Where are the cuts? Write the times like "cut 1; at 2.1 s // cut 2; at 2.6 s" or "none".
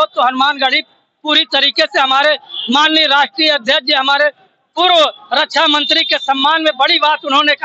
none